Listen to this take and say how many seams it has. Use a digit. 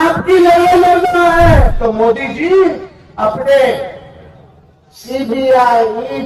1